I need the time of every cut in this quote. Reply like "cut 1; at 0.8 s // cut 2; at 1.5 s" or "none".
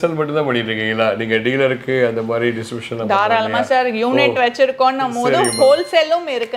none